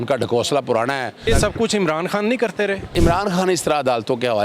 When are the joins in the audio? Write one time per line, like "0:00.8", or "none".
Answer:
0:01.3
0:02.9